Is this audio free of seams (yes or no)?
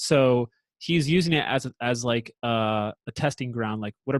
yes